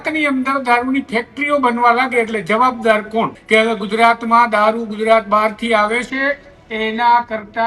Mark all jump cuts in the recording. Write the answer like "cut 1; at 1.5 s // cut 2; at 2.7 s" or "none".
cut 1; at 3.4 s